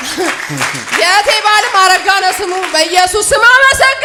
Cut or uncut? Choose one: uncut